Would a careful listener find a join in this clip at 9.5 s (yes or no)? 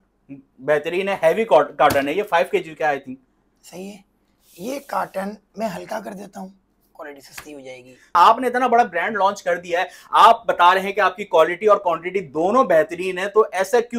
no